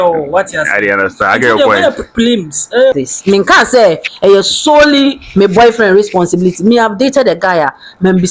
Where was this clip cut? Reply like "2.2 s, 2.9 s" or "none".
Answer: 2.9 s